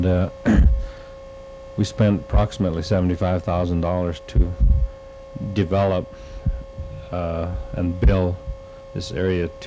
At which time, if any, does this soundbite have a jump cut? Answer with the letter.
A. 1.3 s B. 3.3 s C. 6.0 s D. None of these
B